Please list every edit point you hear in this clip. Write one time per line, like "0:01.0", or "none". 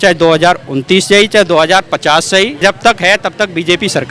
0:02.6